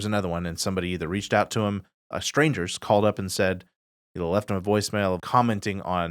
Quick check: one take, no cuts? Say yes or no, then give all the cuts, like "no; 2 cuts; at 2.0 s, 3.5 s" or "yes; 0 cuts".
no; 1 cut; at 5.2 s